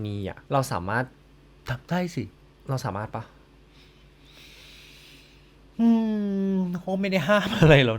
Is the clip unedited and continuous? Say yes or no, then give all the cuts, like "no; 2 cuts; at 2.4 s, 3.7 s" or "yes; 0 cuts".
yes; 0 cuts